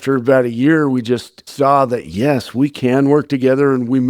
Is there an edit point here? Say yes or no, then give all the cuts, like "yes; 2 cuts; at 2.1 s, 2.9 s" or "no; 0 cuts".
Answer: yes; 1 cut; at 1.4 s